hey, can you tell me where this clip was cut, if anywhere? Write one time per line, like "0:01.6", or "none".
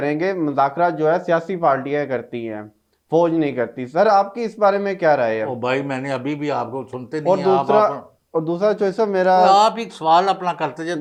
none